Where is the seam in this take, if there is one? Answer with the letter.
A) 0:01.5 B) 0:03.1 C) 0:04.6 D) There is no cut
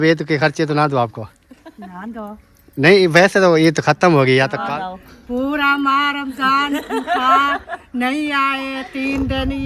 C